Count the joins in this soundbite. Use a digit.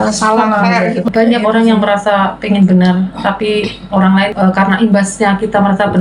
2